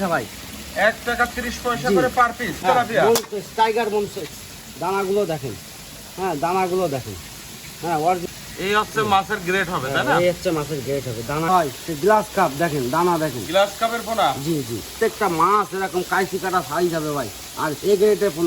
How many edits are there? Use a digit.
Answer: 4